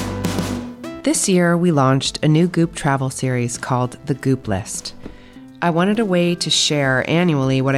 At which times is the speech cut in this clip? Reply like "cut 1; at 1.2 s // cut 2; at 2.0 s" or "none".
cut 1; at 1.0 s